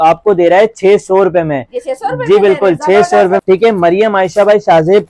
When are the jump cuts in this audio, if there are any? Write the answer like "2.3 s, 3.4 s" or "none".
3.4 s